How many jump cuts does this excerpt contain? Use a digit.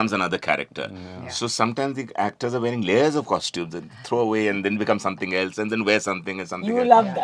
0